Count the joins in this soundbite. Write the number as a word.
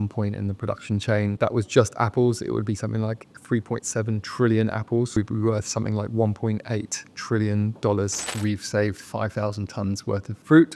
three